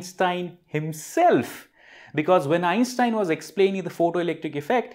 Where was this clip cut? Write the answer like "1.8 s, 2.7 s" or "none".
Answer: none